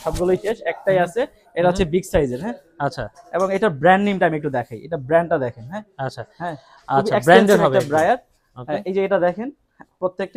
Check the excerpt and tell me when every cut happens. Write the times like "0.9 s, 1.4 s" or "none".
none